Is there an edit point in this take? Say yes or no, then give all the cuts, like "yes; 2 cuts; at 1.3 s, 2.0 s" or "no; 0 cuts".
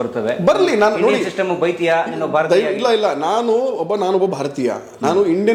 no; 0 cuts